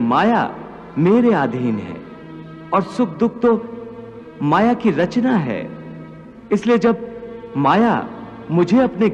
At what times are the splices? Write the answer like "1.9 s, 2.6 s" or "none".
none